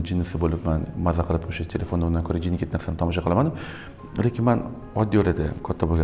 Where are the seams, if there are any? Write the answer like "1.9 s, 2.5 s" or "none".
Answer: none